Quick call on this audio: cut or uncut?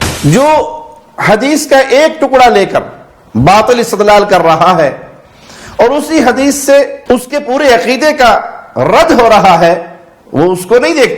cut